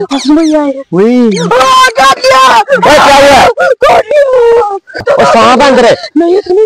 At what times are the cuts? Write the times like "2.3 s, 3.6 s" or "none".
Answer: 4.5 s